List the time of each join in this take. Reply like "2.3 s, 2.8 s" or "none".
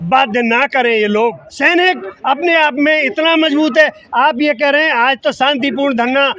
1.5 s